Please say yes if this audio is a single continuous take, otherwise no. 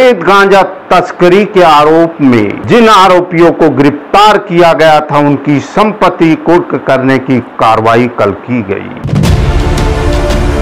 yes